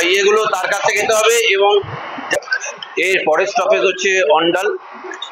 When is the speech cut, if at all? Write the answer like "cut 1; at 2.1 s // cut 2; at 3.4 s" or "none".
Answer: cut 1; at 2.2 s